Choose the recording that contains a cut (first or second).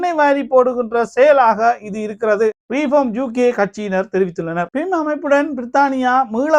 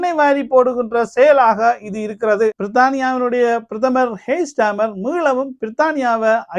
second